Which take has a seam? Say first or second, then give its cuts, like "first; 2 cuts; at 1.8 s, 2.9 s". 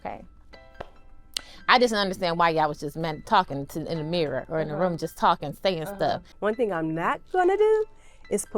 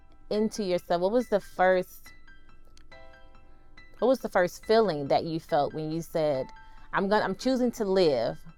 first; 1 cut; at 6.3 s